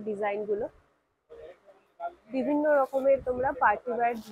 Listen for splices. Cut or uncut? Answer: uncut